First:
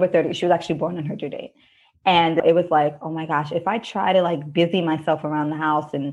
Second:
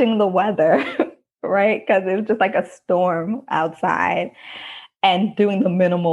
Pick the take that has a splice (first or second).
first